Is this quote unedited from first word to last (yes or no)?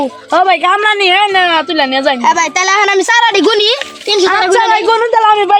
yes